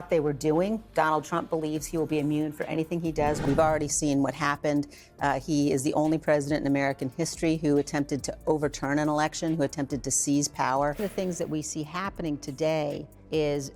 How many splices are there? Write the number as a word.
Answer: two